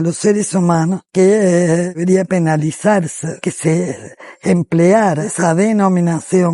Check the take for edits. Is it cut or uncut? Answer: cut